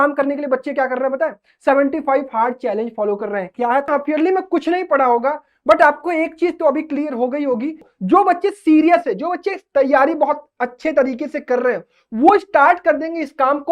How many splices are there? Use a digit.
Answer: 2